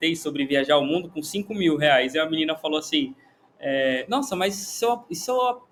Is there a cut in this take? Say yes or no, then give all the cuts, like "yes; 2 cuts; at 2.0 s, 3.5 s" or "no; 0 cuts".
no; 0 cuts